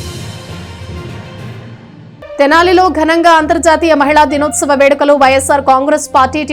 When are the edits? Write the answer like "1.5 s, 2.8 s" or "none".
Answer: 2.0 s